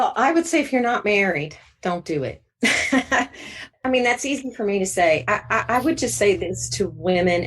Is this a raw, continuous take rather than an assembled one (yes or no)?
no